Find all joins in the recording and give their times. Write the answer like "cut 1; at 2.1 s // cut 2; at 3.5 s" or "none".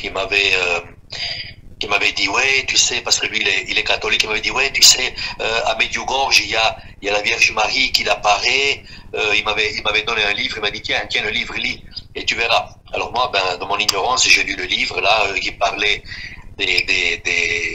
none